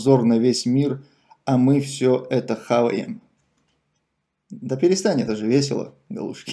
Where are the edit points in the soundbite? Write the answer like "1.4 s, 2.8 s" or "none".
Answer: none